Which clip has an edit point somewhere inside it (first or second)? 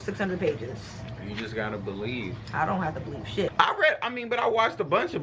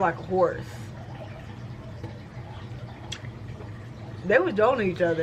first